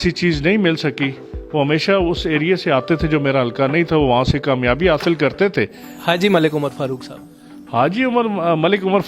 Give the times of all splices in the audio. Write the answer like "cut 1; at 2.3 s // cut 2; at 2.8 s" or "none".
cut 1; at 5.9 s